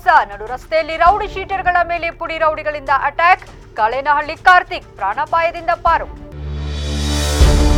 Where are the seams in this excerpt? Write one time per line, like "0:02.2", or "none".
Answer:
none